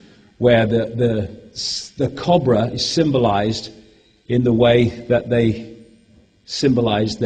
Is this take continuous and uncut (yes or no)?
yes